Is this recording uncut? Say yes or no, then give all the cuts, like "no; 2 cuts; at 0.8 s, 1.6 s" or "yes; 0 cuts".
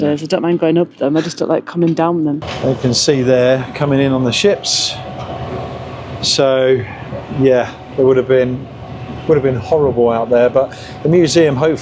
no; 1 cut; at 2.5 s